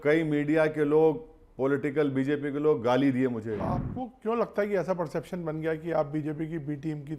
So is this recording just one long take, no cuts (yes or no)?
no